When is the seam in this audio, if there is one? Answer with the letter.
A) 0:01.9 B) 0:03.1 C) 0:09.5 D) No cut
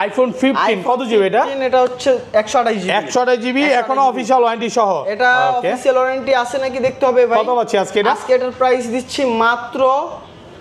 D